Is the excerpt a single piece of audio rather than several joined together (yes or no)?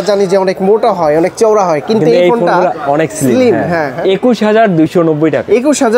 no